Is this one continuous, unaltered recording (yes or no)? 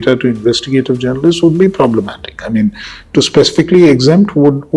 yes